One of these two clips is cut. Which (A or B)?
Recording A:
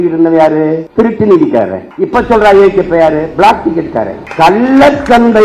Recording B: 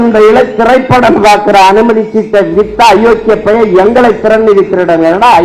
A